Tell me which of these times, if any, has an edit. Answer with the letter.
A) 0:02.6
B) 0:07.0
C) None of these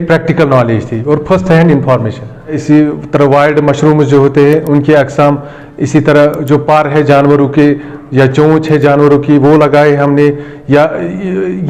A